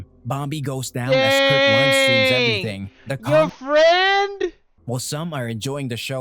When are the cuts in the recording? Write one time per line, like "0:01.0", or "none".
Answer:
0:04.7

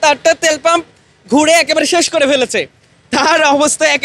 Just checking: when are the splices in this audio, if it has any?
none

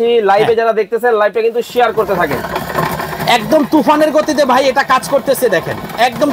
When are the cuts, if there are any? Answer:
none

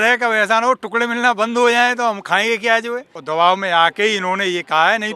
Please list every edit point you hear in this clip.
0:03.1

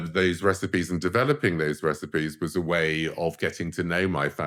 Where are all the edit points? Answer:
none

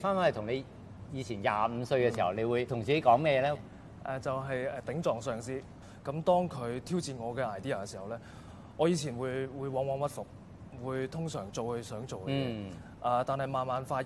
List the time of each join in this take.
0:02.8
0:05.8

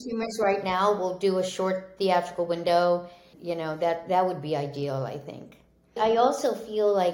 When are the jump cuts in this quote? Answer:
0:03.3
0:06.0

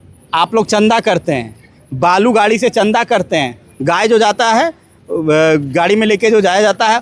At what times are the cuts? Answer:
none

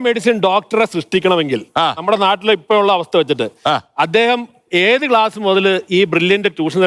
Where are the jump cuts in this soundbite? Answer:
none

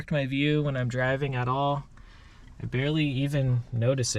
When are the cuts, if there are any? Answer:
none

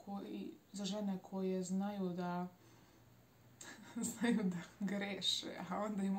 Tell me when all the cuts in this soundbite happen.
none

